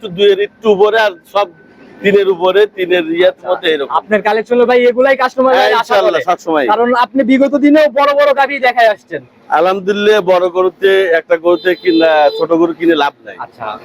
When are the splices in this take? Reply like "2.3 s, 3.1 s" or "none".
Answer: none